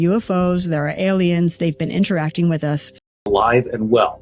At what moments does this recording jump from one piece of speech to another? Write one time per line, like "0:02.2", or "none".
0:03.2